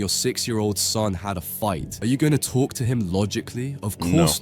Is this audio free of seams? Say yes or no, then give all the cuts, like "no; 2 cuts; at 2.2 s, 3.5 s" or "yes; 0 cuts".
no; 1 cut; at 1.9 s